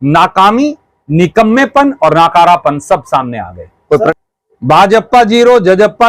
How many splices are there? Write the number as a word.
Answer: one